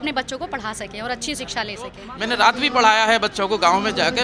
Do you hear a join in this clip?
yes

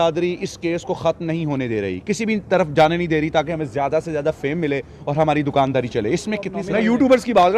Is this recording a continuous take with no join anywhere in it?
no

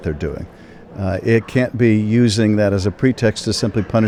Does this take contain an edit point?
no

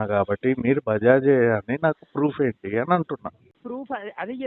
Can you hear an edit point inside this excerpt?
yes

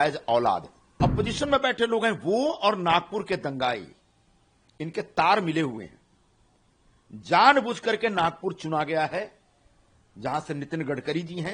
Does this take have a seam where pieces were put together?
yes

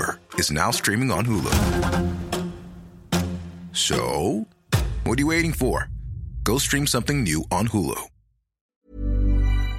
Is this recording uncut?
no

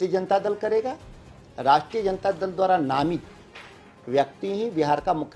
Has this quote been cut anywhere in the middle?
no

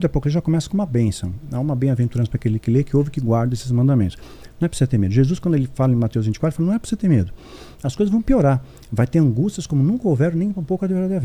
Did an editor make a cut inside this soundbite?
no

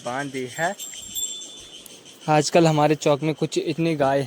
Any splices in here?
no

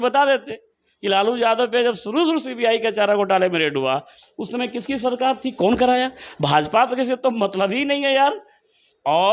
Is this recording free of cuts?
yes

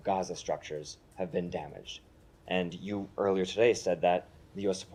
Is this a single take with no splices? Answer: yes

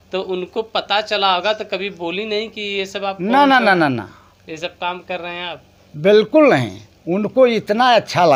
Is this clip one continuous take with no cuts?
yes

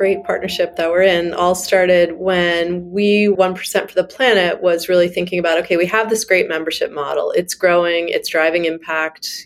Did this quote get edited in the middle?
yes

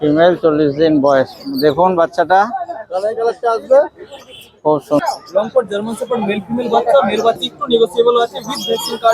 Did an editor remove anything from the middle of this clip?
yes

